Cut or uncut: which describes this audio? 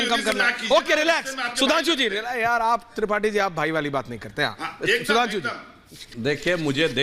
uncut